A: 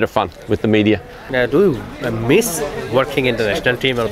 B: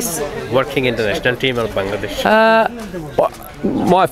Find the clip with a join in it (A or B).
A